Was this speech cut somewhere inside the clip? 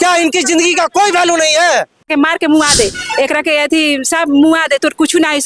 yes; 1 cut; at 2.1 s

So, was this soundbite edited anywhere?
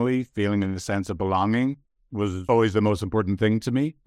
yes; 1 cut; at 2.4 s

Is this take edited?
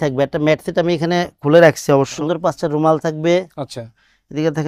yes; 1 cut; at 2.1 s

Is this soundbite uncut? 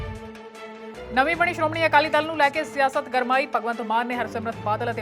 yes; 0 cuts

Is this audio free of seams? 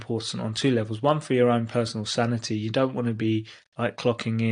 yes; 0 cuts

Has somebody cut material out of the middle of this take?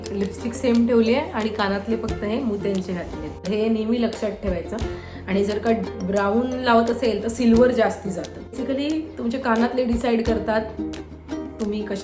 yes; 2 cuts; at 3.4 s, 8.6 s

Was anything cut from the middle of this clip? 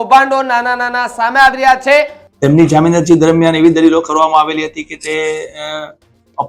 yes; 1 cut; at 2.2 s

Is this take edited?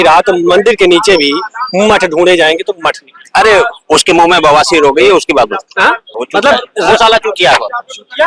no; 0 cuts

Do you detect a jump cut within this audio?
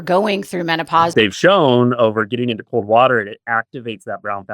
yes; 1 cut; at 1.1 s

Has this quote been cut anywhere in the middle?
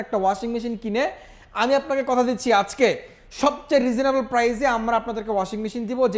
no; 0 cuts

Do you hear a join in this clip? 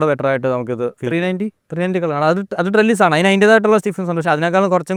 no; 0 cuts

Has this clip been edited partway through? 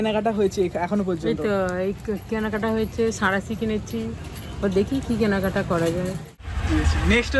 yes; 1 cut; at 6.2 s

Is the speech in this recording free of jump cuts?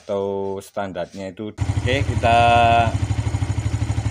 no; 1 cut; at 1.6 s

